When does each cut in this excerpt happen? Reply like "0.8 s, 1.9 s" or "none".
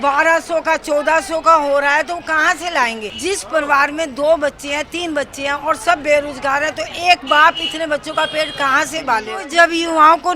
3.1 s, 9.4 s